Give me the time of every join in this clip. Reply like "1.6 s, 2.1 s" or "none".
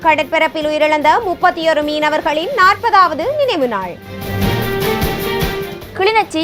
none